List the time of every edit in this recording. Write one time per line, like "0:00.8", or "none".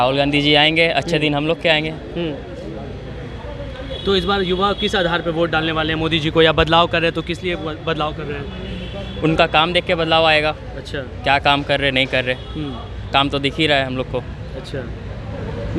none